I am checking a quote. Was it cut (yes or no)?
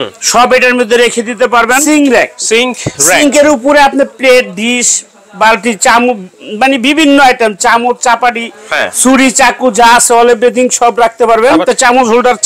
yes